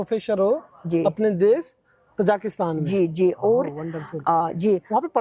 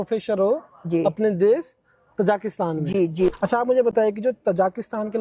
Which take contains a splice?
second; 1 cut; at 3.3 s

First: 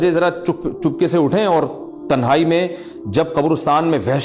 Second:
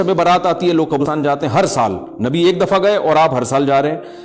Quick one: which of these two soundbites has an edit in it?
second; 1 cut; at 1.0 s

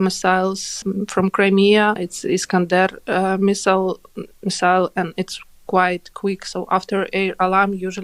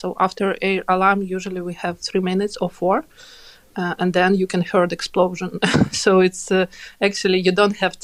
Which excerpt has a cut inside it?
first; 2 cuts; at 0.8 s, 2.1 s

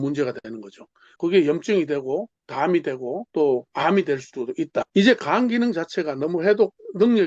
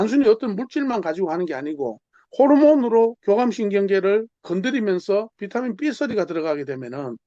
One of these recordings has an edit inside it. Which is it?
first; 2 cuts; at 1.1 s, 4.9 s

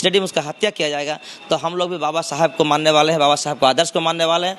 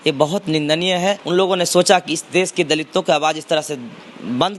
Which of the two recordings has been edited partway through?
second; 1 cut; at 1.2 s

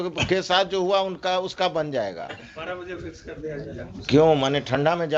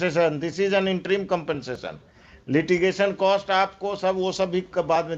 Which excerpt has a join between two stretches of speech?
first; 1 cut; at 2.5 s

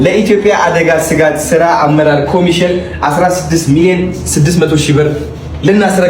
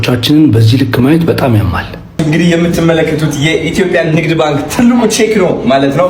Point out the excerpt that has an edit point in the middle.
second; 1 cut; at 2.1 s

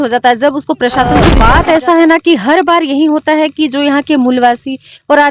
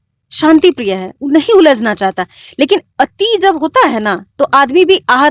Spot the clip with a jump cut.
first; 1 cut; at 1.3 s

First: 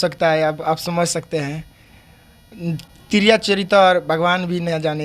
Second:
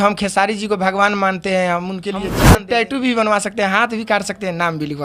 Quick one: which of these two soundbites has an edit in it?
second; 1 cut; at 2.4 s

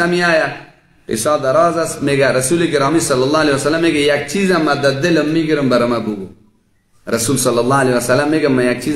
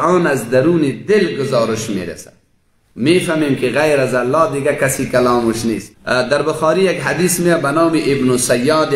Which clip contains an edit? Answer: second; 1 cut; at 5.9 s

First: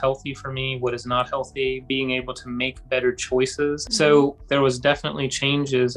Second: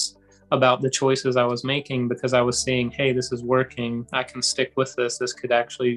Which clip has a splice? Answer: first; 2 cuts; at 3.8 s, 4.4 s

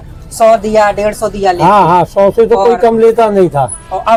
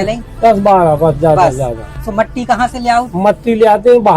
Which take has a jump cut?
second; 1 cut; at 2.0 s

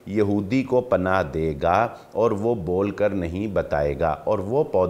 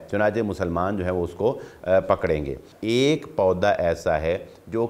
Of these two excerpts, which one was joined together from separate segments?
second; 1 cut; at 2.7 s

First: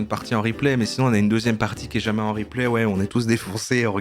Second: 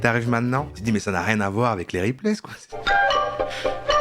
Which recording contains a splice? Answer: second; 1 cut; at 2.8 s

